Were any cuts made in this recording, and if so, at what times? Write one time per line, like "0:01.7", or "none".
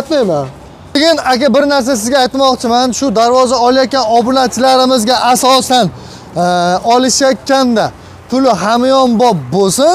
0:01.0